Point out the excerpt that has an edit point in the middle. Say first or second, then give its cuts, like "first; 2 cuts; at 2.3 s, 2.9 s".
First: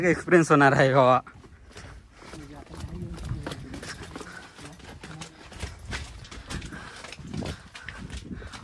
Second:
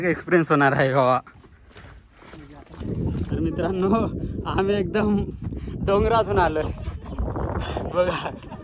second; 1 cut; at 2.7 s